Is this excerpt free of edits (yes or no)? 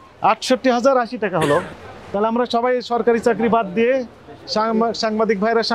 no